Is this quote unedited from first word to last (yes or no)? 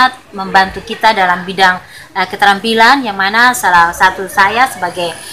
yes